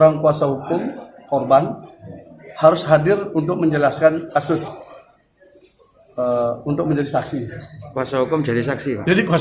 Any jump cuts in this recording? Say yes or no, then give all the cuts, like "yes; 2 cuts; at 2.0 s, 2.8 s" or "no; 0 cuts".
no; 0 cuts